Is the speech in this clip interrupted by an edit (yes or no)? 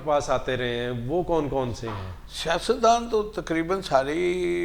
no